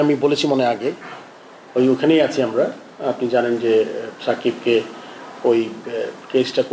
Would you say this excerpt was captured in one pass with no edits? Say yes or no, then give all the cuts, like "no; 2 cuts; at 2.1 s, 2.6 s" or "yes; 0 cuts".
yes; 0 cuts